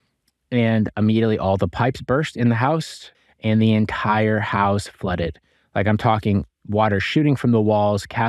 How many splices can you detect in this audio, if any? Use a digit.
1